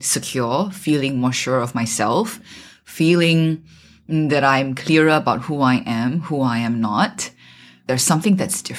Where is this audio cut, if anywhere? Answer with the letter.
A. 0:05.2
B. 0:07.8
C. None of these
B